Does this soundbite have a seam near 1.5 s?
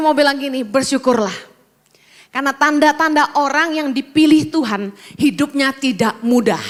no; 0 cuts

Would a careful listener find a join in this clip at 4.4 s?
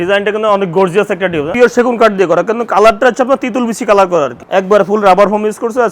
yes; 2 cuts; at 1.5 s, 4.4 s

